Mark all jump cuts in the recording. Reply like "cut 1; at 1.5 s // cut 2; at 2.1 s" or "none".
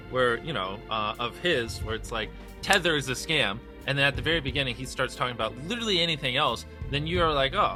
none